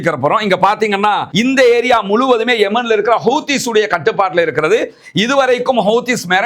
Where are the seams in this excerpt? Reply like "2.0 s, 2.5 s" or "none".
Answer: 1.3 s